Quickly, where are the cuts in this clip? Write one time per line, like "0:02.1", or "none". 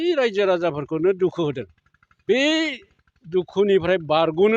0:02.4